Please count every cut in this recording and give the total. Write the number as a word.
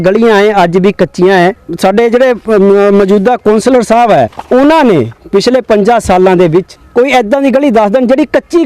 three